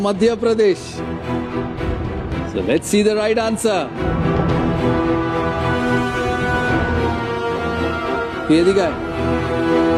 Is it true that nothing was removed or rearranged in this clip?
yes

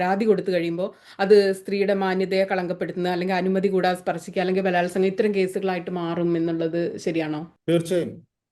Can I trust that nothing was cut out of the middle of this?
no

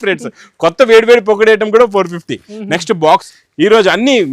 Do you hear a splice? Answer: yes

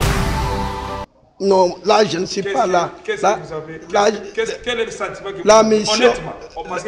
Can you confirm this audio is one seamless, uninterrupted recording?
yes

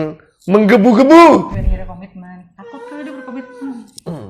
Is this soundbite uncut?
no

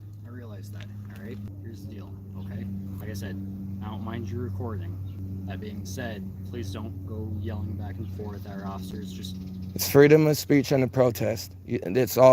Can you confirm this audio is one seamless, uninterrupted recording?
no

